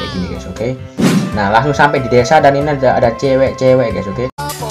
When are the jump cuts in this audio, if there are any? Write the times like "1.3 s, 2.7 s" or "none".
1.0 s